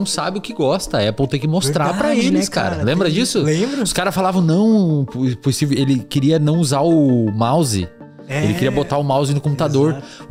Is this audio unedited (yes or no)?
yes